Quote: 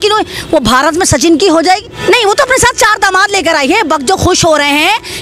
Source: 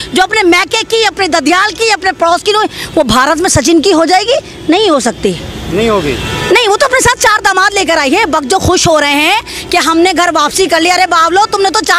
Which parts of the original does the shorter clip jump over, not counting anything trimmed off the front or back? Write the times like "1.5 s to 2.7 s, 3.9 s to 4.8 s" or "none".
4.2 s to 6.2 s